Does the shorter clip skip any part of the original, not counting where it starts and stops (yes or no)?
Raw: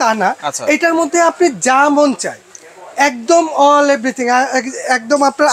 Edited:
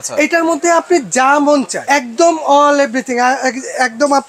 yes